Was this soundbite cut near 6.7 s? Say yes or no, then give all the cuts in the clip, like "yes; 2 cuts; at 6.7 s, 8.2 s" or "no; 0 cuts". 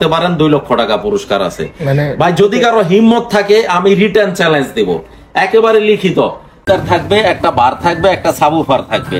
yes; 1 cut; at 6.7 s